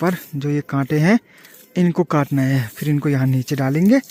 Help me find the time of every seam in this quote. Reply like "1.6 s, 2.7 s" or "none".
none